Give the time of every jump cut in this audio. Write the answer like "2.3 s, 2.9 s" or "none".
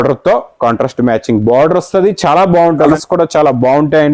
2.9 s